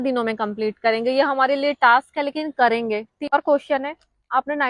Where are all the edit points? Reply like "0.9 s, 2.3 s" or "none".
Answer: 3.2 s